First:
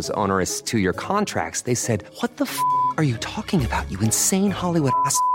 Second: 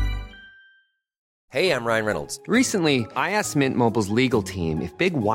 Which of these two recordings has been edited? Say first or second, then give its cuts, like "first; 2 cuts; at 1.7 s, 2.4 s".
second; 1 cut; at 1.3 s